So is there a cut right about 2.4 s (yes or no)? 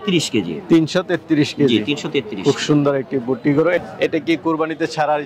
no